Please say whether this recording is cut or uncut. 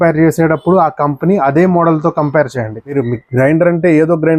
uncut